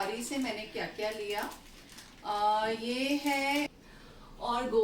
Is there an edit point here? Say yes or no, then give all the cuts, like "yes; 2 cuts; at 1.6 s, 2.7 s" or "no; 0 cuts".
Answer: yes; 1 cut; at 3.8 s